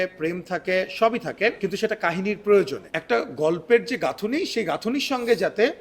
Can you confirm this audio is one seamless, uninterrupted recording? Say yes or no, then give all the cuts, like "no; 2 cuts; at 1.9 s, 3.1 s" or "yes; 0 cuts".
no; 2 cuts; at 1.6 s, 2.9 s